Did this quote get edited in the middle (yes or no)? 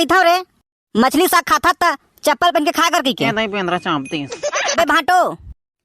yes